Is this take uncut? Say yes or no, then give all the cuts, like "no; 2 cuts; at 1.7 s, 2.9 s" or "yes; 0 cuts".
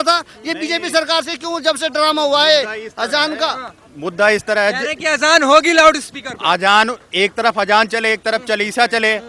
yes; 0 cuts